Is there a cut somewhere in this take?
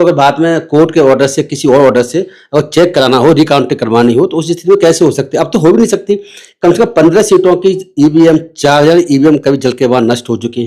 no; 0 cuts

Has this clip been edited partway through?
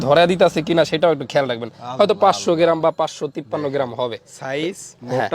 no; 0 cuts

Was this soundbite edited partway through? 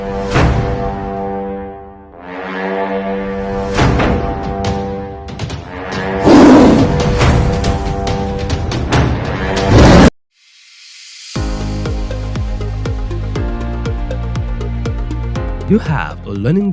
yes; 1 cut; at 10.1 s

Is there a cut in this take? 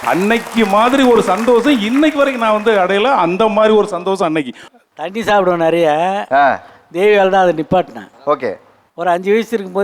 yes; 1 cut; at 4.8 s

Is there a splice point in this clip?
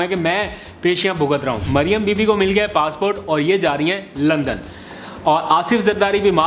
yes; 1 cut; at 1.6 s

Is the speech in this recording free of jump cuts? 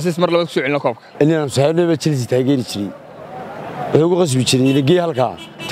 yes; 0 cuts

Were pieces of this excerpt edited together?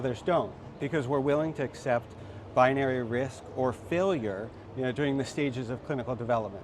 no; 0 cuts

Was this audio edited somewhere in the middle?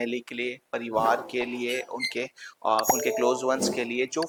no; 0 cuts

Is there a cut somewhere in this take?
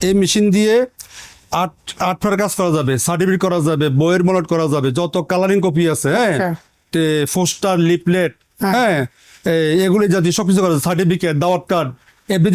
no; 0 cuts

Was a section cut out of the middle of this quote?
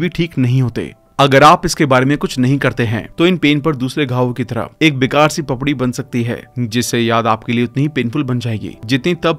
no; 0 cuts

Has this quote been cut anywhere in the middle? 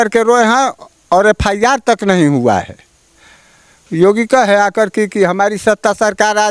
no; 0 cuts

